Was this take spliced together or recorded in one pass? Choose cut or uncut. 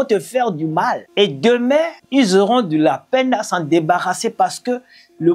cut